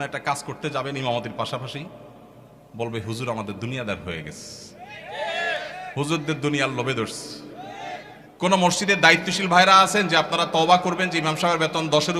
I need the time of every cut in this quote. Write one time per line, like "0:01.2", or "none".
0:08.2